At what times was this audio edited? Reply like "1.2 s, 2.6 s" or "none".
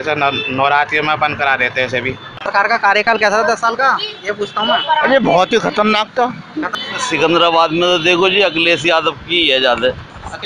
2.3 s, 6.7 s